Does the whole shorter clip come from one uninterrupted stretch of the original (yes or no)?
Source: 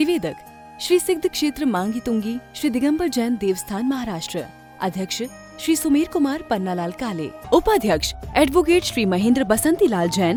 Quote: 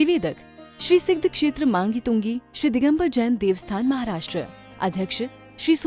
yes